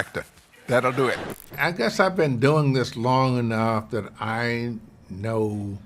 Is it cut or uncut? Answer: cut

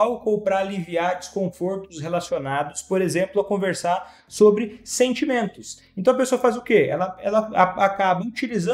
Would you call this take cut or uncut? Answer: uncut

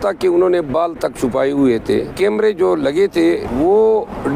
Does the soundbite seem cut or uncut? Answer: cut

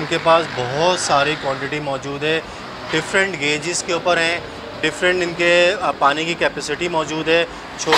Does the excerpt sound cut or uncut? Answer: uncut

